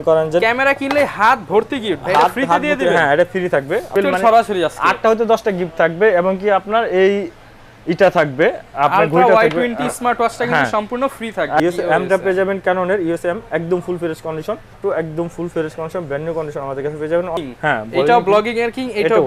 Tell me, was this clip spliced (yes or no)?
yes